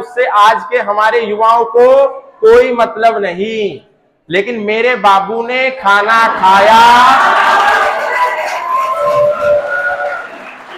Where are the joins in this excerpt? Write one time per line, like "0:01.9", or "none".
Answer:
none

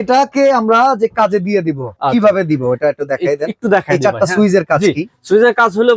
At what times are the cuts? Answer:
none

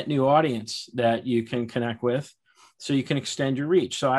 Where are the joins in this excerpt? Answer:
none

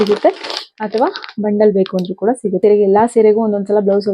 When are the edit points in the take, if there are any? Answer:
0:02.6

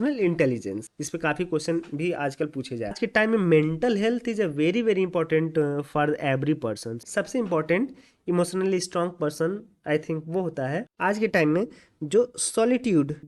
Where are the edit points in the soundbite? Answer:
0:03.0
0:04.7
0:07.1

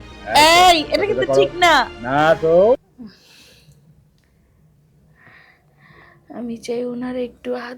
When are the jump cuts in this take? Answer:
0:02.8

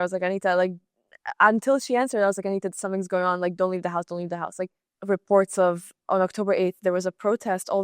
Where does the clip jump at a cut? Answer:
0:04.9

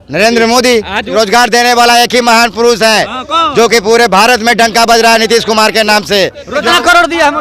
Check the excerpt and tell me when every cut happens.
0:01.0
0:06.6

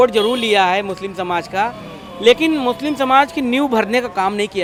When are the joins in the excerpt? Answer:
none

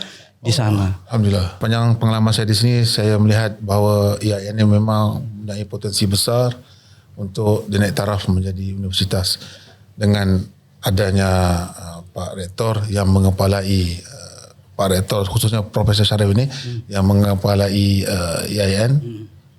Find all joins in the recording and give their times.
0:01.6

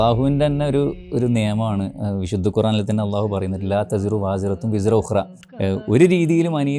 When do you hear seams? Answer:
0:05.4

